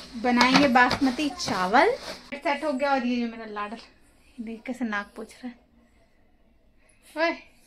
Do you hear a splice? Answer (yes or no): yes